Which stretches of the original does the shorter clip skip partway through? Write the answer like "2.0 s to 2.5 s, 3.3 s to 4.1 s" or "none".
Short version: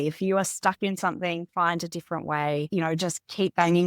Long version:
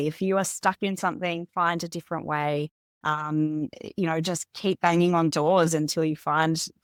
2.7 s to 3.9 s